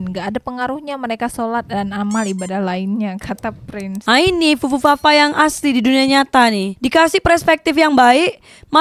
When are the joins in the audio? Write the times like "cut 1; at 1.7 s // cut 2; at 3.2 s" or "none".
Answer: none